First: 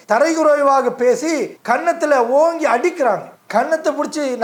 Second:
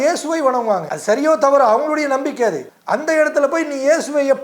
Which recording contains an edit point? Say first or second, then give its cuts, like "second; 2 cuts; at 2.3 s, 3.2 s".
second; 2 cuts; at 0.9 s, 2.7 s